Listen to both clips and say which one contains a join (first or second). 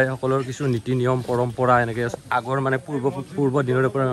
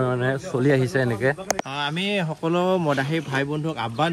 second